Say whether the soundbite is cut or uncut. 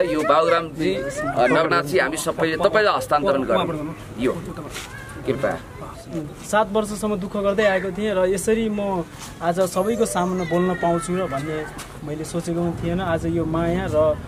cut